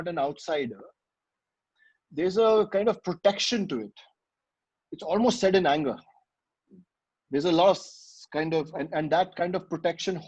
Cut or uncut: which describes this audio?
uncut